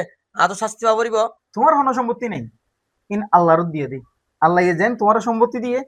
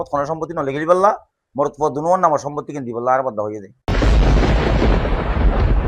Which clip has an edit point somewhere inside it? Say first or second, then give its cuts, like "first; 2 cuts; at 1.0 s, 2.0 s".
second; 1 cut; at 3.7 s